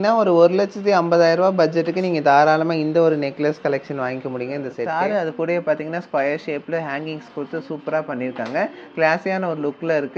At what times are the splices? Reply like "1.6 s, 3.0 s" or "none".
4.9 s